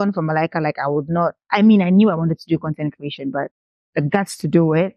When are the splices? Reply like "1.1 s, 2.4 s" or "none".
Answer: none